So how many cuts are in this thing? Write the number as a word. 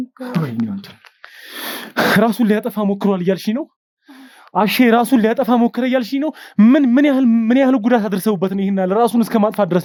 zero